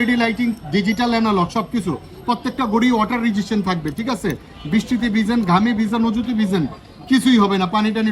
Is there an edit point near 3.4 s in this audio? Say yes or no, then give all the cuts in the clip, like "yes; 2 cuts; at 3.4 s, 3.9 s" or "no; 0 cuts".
no; 0 cuts